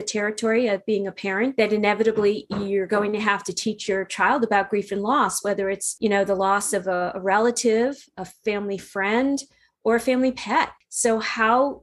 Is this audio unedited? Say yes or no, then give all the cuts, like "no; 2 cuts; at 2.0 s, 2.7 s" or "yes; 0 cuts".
no; 3 cuts; at 1.5 s, 5.9 s, 10.8 s